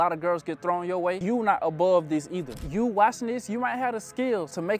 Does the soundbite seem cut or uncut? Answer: cut